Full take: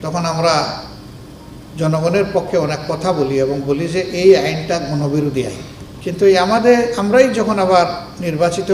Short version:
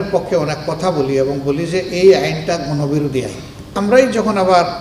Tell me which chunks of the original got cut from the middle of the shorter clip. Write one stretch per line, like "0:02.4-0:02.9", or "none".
0:05.9-0:06.9

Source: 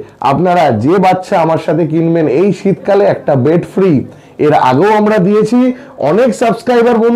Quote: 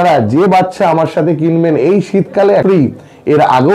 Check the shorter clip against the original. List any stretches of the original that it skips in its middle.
0:03.1-0:03.8

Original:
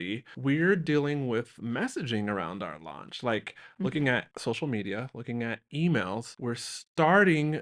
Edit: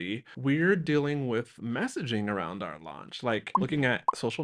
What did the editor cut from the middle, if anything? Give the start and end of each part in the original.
0:03.5-0:03.7

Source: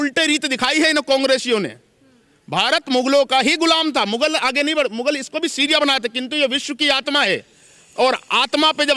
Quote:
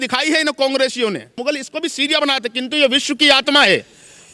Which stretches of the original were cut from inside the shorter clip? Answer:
0:01.8-0:05.0

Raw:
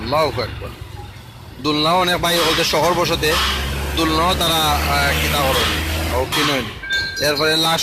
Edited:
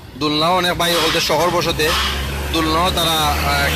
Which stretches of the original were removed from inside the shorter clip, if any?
none

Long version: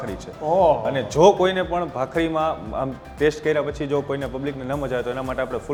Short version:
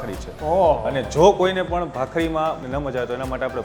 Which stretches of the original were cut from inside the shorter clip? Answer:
0:02.6-0:04.6

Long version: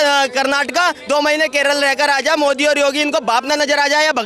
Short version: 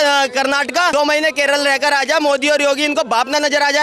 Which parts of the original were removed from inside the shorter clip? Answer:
0:00.9-0:01.1

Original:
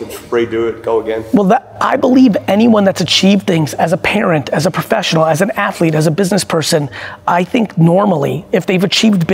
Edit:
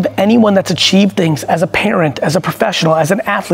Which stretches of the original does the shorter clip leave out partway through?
none

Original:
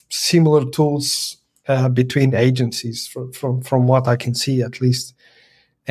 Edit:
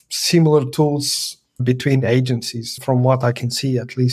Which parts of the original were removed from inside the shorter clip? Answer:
0:01.6-0:01.9
0:03.1-0:03.6

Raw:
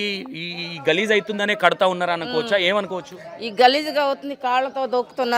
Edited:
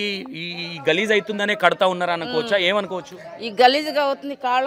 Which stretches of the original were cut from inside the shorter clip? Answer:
none

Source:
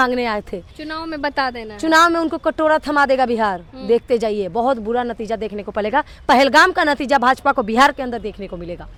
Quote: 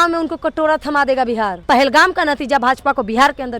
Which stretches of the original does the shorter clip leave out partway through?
0:03.6-0:06.2

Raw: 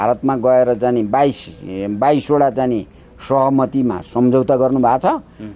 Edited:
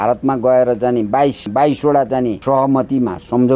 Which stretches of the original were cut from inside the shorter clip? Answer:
0:01.4-0:01.9
0:02.8-0:03.2

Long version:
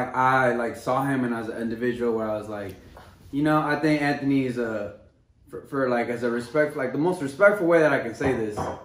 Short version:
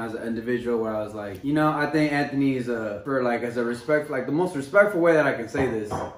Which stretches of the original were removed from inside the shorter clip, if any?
0:02.6-0:03.1
0:04.9-0:05.6

